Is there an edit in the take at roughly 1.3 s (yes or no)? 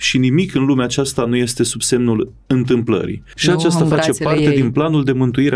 no